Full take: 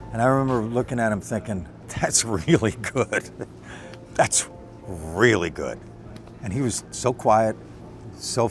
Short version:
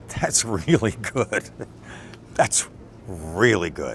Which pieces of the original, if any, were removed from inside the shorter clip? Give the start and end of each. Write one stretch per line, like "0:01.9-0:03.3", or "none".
none